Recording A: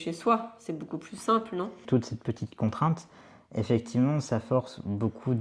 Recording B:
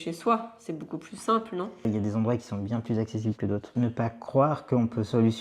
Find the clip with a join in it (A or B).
B